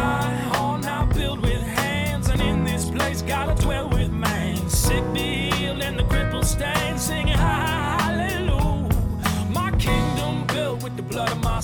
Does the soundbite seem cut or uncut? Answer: uncut